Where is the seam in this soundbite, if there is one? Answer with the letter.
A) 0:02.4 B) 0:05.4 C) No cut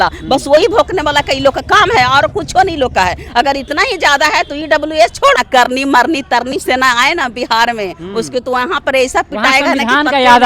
B